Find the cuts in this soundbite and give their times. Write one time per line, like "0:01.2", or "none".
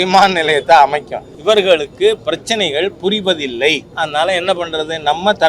0:01.3
0:03.9